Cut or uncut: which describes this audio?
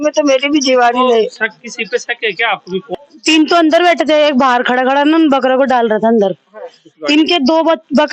cut